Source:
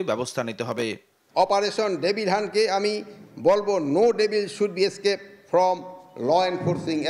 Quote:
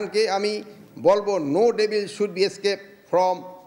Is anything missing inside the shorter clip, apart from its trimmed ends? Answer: no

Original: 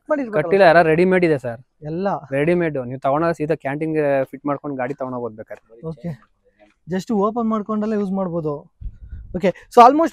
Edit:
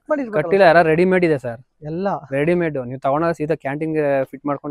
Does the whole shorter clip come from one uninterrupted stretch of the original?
yes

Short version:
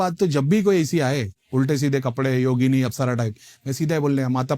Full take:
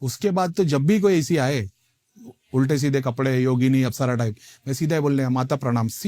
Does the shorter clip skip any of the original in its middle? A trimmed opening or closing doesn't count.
yes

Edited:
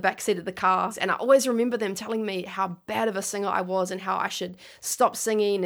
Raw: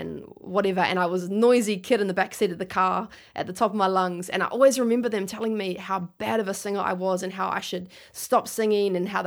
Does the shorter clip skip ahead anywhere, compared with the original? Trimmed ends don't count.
yes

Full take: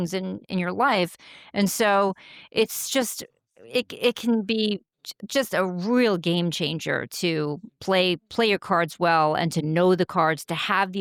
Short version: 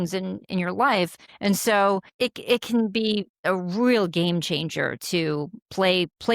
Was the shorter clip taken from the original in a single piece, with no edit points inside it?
no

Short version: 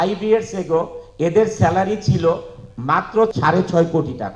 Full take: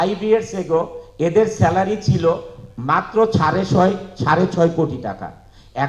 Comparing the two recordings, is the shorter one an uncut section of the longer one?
no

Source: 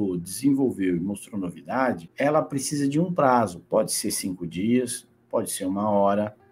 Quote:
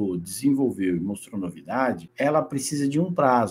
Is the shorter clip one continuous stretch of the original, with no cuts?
yes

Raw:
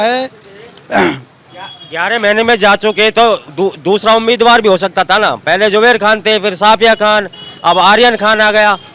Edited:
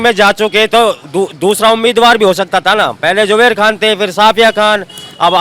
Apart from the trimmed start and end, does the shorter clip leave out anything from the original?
no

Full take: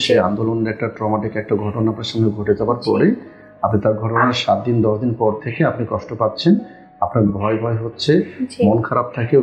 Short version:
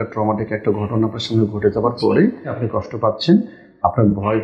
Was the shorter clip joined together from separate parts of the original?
yes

